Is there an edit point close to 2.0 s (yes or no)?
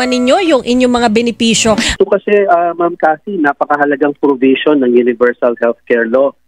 yes